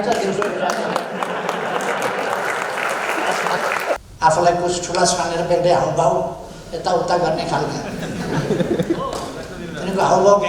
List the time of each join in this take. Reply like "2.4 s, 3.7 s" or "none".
4.0 s